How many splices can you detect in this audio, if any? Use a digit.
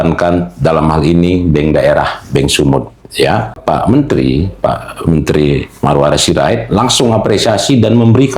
1